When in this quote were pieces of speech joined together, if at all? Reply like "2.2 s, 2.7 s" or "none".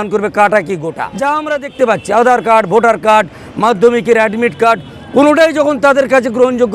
1.1 s